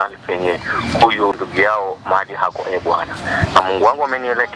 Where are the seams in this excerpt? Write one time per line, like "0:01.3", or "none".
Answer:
0:01.4